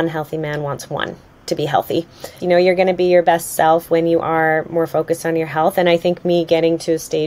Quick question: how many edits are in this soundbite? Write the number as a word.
one